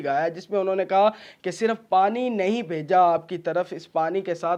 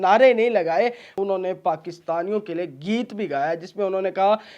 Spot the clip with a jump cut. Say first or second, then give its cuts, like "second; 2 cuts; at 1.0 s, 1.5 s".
second; 1 cut; at 1.1 s